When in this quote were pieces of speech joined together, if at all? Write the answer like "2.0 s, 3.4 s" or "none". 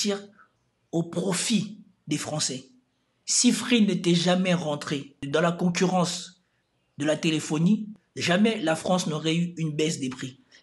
5.1 s, 8.0 s